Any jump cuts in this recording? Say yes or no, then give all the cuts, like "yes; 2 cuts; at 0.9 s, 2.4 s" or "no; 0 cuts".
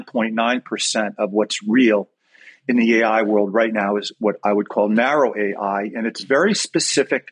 no; 0 cuts